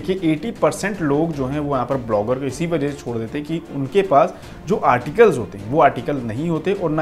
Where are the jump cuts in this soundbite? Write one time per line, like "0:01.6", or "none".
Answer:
none